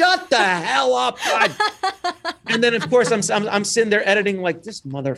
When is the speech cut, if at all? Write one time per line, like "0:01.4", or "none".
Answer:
none